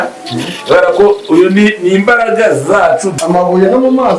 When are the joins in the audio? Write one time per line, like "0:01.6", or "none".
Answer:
0:03.1